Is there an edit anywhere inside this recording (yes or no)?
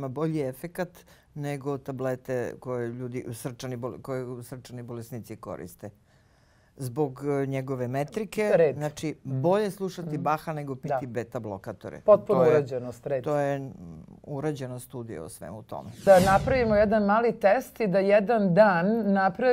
yes